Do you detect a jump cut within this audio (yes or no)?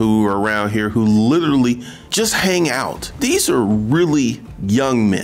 yes